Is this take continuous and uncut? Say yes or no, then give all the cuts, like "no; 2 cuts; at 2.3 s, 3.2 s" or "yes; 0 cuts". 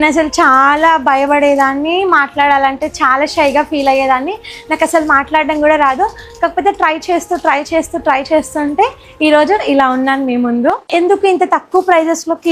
no; 1 cut; at 10.9 s